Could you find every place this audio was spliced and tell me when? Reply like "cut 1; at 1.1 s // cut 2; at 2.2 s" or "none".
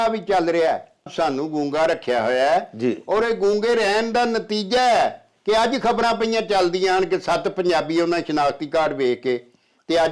cut 1; at 1.1 s